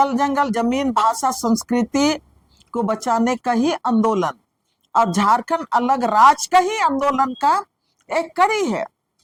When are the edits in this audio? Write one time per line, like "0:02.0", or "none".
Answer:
none